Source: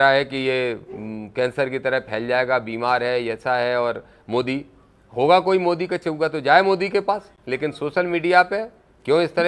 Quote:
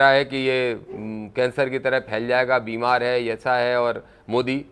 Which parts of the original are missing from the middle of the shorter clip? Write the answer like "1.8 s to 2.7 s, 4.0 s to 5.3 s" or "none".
none